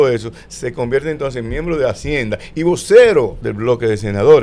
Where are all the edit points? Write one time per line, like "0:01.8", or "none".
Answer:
0:03.4

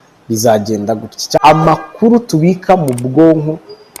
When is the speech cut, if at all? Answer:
0:01.4

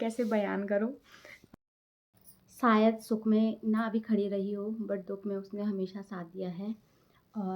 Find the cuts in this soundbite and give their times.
0:01.5

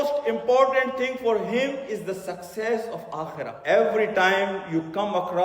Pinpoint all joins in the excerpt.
0:03.6

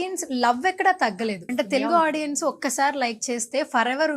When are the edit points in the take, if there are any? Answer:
0:01.5

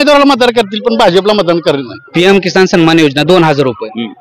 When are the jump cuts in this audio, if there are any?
0:02.0

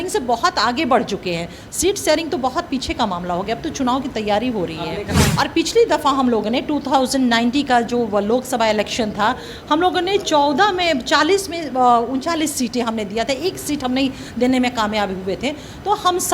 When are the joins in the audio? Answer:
0:05.1

